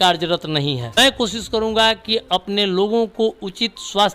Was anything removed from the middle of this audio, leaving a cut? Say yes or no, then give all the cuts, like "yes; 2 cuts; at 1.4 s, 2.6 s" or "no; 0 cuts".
yes; 1 cut; at 0.9 s